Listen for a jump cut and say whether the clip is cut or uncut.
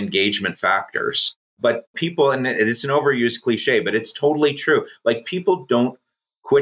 cut